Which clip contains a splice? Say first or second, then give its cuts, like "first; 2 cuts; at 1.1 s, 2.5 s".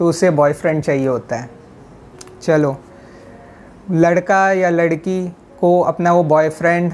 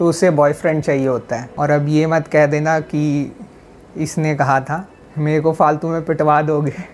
second; 2 cuts; at 1.4 s, 5.0 s